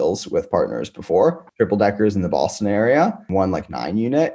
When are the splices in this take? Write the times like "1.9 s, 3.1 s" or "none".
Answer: 1.5 s, 3.2 s

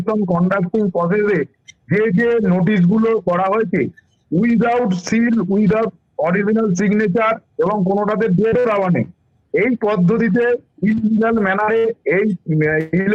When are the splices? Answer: none

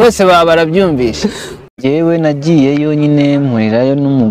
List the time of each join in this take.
1.7 s

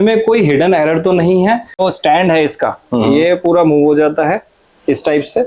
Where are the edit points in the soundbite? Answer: 1.8 s

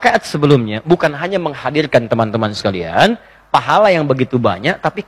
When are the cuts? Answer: none

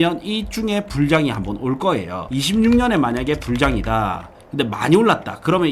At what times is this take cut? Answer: 2.2 s

